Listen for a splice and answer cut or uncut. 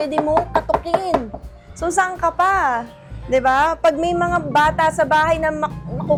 uncut